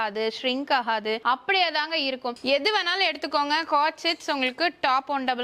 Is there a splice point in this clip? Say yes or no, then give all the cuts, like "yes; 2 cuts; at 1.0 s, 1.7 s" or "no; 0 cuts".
yes; 2 cuts; at 1.2 s, 2.4 s